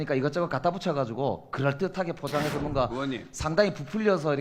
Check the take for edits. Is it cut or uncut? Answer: uncut